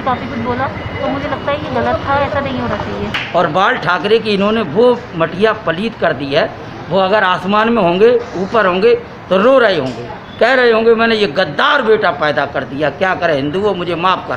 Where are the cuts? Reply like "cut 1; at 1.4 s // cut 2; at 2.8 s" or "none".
cut 1; at 3.2 s